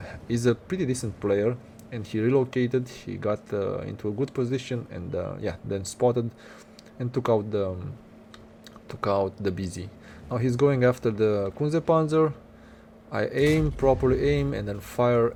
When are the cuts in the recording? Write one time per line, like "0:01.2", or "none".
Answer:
none